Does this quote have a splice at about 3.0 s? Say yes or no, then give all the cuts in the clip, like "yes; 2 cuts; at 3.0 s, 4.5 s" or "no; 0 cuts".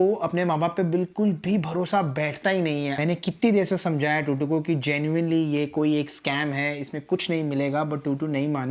yes; 1 cut; at 3.0 s